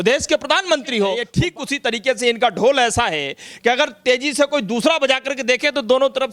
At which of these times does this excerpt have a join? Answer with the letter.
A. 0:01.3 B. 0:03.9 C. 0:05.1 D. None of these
A